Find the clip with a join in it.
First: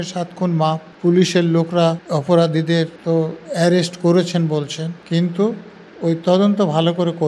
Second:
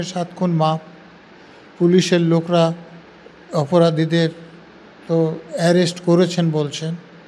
first; 4 cuts; at 0.9 s, 2.0 s, 3.0 s, 5.0 s

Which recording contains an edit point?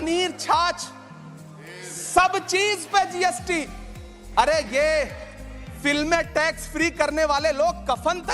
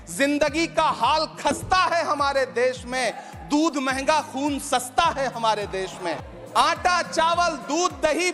second; 1 cut; at 6.1 s

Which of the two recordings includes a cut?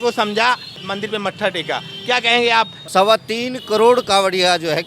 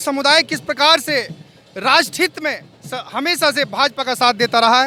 first; 1 cut; at 2.8 s

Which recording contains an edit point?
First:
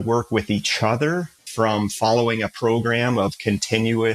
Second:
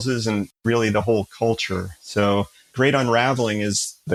first; 1 cut; at 1.4 s

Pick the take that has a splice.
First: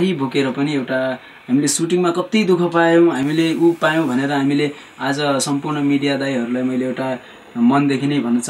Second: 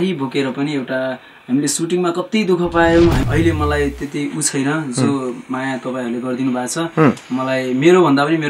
second; 1 cut; at 3.2 s

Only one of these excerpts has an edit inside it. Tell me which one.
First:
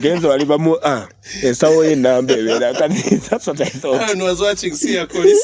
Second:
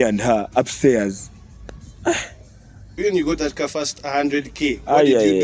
second; 1 cut; at 2.9 s

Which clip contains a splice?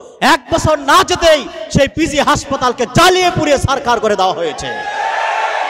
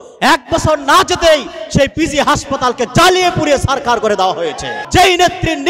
second; 1 cut; at 4.8 s

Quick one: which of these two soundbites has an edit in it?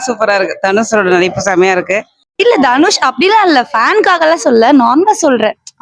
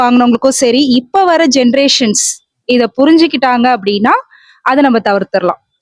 first; 1 cut; at 2.2 s

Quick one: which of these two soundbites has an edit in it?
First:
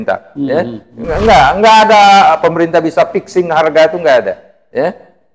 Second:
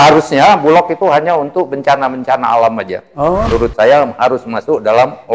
second; 1 cut; at 3.5 s

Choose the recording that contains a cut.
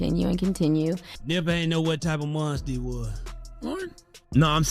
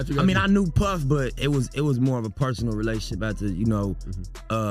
first; 1 cut; at 1.1 s

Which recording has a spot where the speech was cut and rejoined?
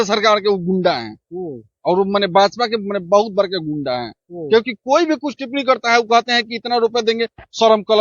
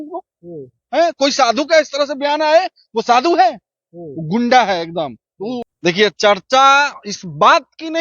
second; 1 cut; at 5.6 s

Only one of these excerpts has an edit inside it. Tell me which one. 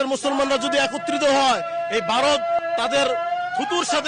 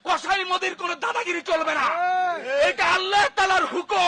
first; 1 cut; at 2.6 s

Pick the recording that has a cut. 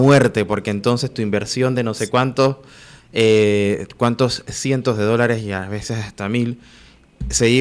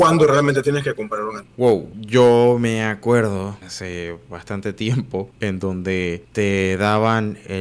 second; 4 cuts; at 1.9 s, 3.7 s, 5.3 s, 6.2 s

